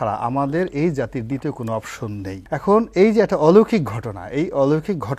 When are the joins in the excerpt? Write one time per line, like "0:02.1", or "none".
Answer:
0:02.3